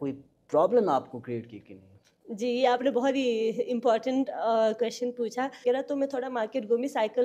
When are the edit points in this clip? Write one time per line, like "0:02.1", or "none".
0:05.6